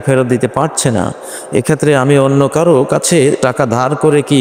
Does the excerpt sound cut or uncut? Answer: uncut